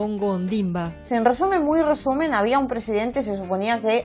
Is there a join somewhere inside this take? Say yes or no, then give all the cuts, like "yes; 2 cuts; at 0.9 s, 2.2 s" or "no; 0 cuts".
yes; 1 cut; at 1.0 s